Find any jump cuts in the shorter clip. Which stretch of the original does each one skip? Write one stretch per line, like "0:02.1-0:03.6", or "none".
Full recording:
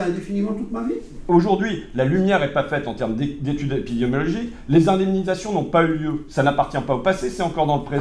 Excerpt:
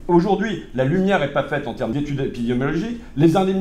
0:03.1-0:03.4